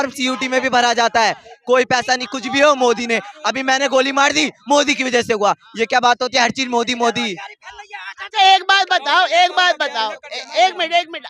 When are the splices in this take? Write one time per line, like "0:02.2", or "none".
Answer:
none